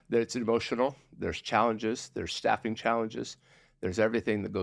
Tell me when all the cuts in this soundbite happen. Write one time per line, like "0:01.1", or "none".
none

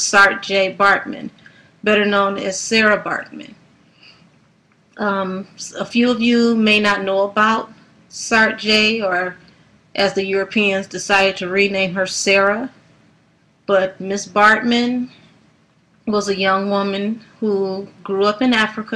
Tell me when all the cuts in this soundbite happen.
0:10.1

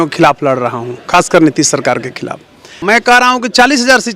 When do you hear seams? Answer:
0:02.8

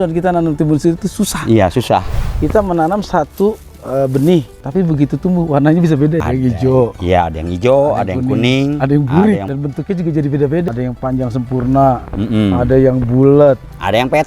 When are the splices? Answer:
0:02.2
0:04.6
0:06.2
0:09.5
0:10.6

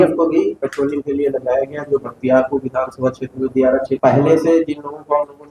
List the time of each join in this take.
0:04.0

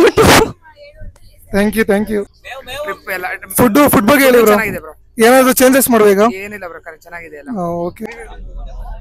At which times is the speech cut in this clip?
0:02.3
0:08.1

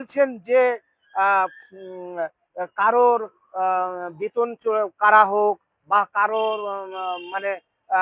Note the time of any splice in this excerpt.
none

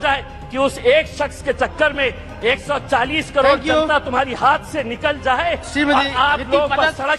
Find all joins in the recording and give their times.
none

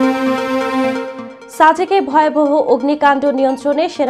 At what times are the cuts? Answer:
0:01.1

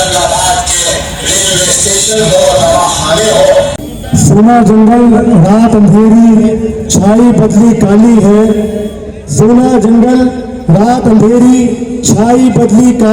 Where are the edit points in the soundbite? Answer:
0:03.9

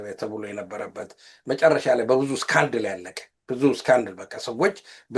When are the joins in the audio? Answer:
none

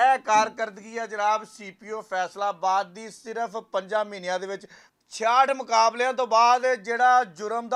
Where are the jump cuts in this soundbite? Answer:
none

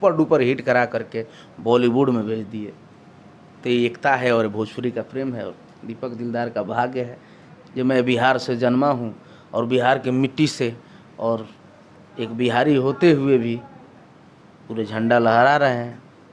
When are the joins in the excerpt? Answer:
none

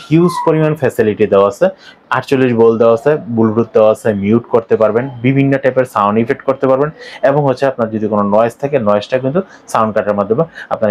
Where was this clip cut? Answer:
none

